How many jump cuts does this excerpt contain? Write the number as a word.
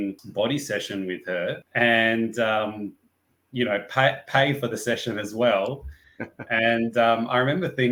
zero